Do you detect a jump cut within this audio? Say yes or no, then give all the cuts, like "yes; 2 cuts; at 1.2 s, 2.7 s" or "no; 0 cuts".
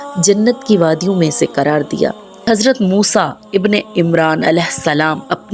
yes; 1 cut; at 2.4 s